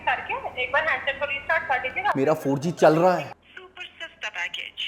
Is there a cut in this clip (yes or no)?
yes